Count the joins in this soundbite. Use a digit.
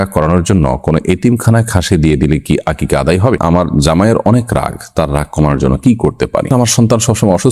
2